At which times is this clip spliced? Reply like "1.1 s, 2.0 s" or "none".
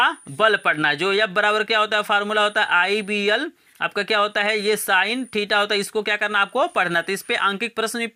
none